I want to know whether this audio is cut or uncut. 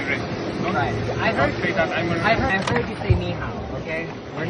uncut